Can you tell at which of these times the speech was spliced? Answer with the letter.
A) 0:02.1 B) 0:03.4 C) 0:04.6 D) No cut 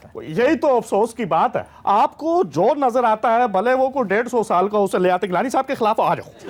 D